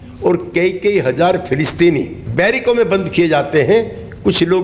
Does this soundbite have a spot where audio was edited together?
yes; 1 cut; at 2.2 s

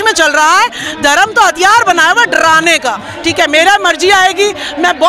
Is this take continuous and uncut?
no; 1 cut; at 3.1 s

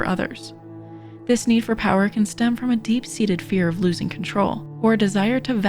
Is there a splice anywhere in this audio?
yes; 1 cut; at 4.7 s

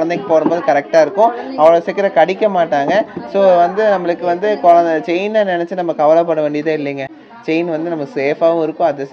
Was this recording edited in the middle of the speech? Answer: no; 0 cuts

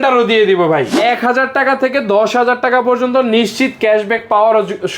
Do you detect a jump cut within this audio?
yes; 1 cut; at 0.9 s

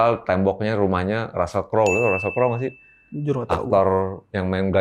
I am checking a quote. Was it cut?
no; 0 cuts

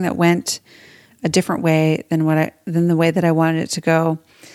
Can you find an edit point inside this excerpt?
no; 0 cuts

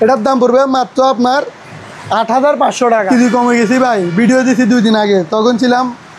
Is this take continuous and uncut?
no; 1 cut; at 3.1 s

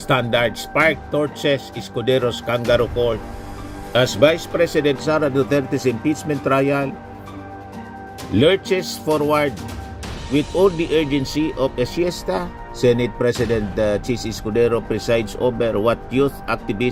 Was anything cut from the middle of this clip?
no; 0 cuts

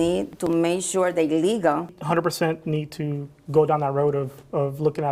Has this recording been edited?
yes; 1 cut; at 1.9 s

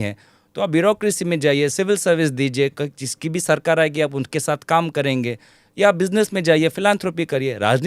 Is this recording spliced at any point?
no; 0 cuts

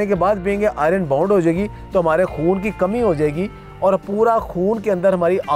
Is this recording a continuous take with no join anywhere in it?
yes; 0 cuts

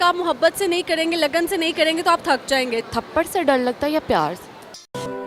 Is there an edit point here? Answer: yes; 1 cut; at 2.8 s

